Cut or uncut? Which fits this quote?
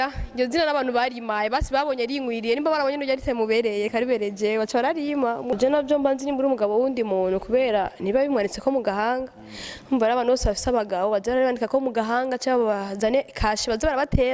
cut